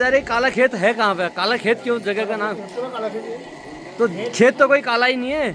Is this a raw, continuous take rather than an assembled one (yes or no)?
yes